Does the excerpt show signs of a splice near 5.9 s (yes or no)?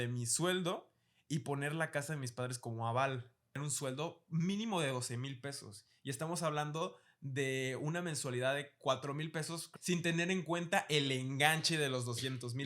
no